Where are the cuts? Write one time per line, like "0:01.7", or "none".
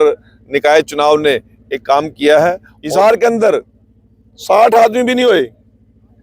0:02.7